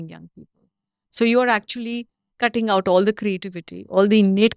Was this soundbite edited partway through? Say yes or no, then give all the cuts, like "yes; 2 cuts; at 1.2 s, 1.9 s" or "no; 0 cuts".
no; 0 cuts